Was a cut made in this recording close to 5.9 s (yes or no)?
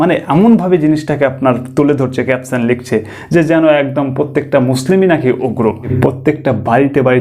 yes